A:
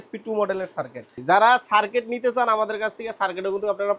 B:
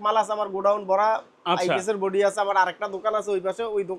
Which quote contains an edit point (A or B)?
A